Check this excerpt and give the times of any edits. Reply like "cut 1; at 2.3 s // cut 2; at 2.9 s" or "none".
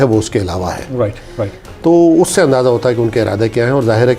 none

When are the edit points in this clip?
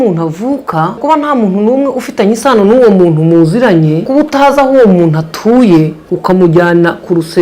cut 1; at 1.0 s // cut 2; at 4.1 s // cut 3; at 6.0 s

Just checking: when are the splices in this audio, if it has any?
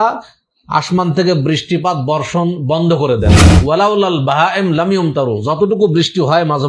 cut 1; at 3.5 s

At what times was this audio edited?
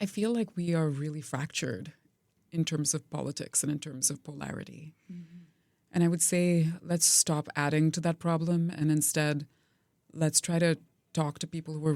cut 1; at 2.3 s

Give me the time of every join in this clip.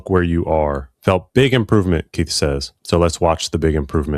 cut 1; at 0.9 s // cut 2; at 2.7 s

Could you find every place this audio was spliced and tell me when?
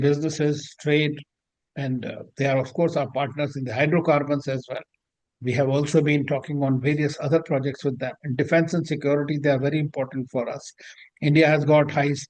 none

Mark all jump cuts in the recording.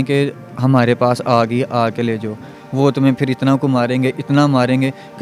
cut 1; at 2.5 s

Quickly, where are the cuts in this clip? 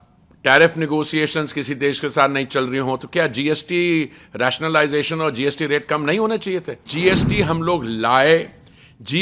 cut 1; at 6.9 s

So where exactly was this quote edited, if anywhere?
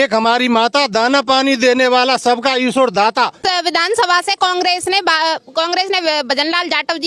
cut 1; at 3.4 s

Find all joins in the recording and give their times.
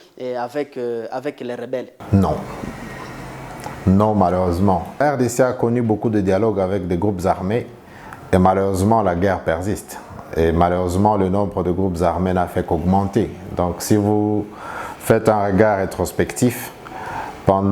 cut 1; at 2.0 s // cut 2; at 5.0 s

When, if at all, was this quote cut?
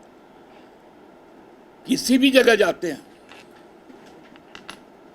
none

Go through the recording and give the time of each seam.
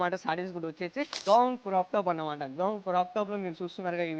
cut 1; at 1.1 s

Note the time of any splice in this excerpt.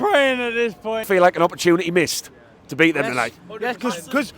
cut 1; at 1.0 s

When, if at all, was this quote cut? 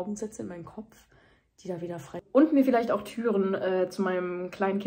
cut 1; at 2.2 s

